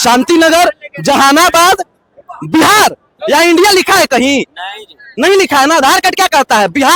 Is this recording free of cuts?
yes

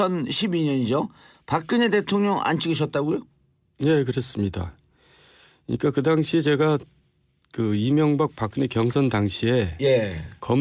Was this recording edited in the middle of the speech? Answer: yes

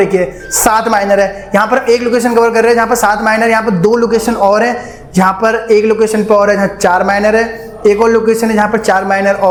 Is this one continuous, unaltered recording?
yes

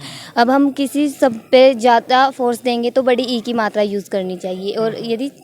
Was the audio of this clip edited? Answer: no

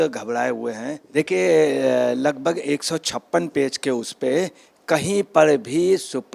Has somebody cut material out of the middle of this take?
yes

